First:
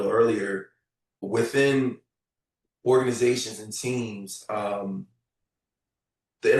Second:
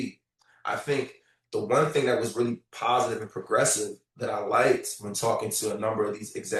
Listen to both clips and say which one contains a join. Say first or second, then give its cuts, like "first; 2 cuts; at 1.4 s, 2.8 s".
first; 1 cut; at 1.2 s